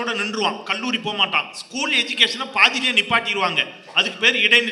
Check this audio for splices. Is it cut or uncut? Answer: uncut